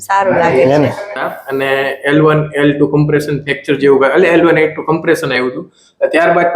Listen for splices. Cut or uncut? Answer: cut